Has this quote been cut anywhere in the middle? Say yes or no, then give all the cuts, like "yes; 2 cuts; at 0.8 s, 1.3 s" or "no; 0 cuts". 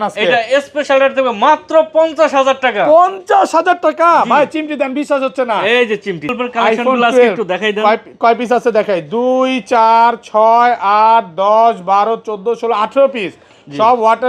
yes; 1 cut; at 6.3 s